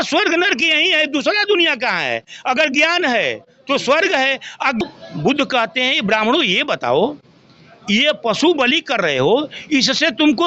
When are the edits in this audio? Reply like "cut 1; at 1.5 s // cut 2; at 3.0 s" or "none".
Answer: cut 1; at 4.8 s

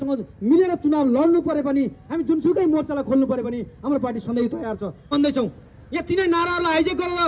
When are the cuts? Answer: cut 1; at 5.1 s

